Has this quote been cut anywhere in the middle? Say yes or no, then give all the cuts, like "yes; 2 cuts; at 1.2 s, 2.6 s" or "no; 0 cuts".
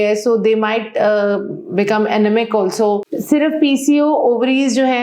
yes; 1 cut; at 3.1 s